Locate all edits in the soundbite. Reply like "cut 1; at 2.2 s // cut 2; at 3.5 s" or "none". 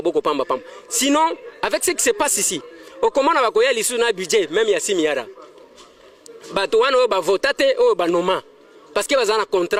none

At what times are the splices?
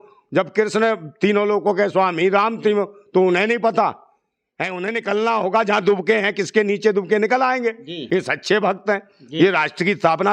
cut 1; at 7.9 s

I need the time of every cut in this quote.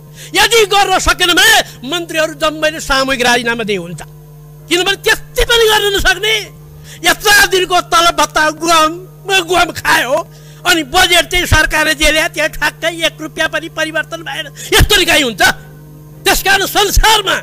cut 1; at 6.9 s

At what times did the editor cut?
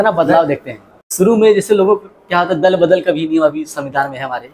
cut 1; at 1.0 s

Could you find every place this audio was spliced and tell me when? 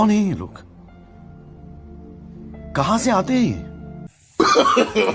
none

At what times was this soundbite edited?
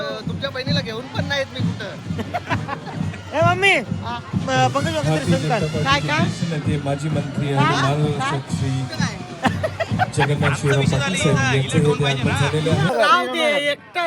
cut 1; at 12.9 s

